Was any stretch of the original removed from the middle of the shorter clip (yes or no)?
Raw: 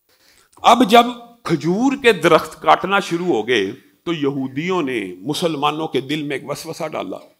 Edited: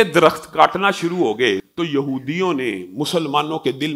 yes